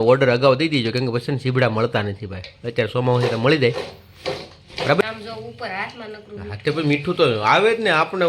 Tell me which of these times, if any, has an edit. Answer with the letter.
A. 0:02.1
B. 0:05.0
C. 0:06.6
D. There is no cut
B